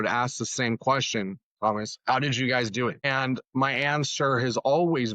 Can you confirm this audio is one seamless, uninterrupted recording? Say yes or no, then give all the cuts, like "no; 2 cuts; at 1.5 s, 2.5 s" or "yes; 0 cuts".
no; 1 cut; at 3.0 s